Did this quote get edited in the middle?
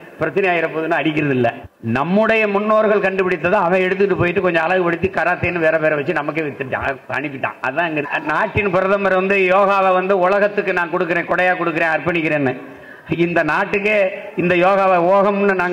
yes; 2 cuts; at 1.7 s, 8.1 s

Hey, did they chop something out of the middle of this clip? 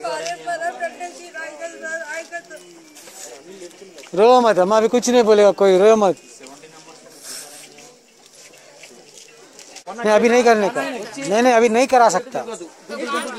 yes; 1 cut; at 9.8 s

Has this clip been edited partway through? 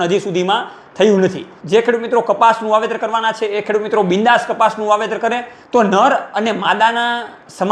yes; 2 cuts; at 1.5 s, 5.5 s

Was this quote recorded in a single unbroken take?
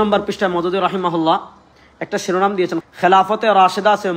no; 1 cut; at 2.8 s

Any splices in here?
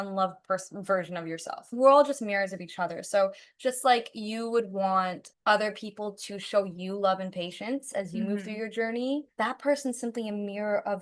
yes; 2 cuts; at 1.7 s, 5.3 s

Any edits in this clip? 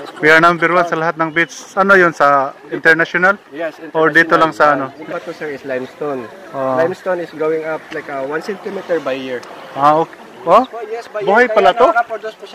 yes; 1 cut; at 5.1 s

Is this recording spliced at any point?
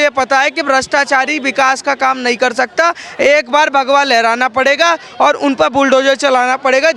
no; 0 cuts

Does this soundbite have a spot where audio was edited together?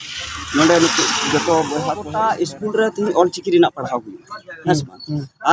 yes; 1 cut; at 2.1 s

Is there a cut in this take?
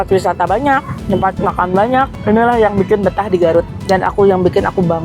yes; 3 cuts; at 0.9 s, 2.2 s, 3.8 s

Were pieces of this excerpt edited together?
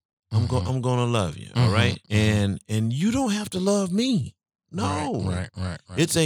yes; 2 cuts; at 2.0 s, 4.6 s

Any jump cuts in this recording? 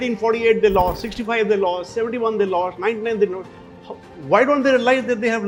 no; 0 cuts

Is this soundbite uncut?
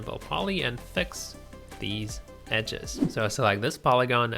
no; 1 cut; at 3.0 s

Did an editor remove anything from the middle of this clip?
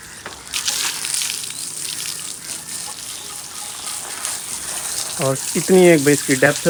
no; 0 cuts

